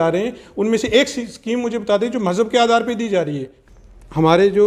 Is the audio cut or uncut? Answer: cut